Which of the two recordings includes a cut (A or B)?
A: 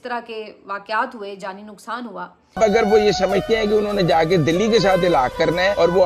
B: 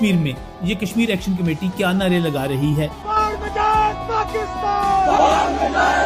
A